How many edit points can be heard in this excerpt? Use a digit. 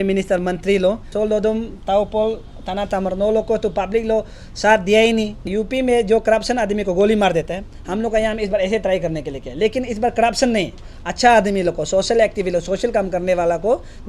2